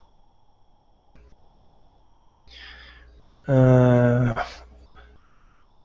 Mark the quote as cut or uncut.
cut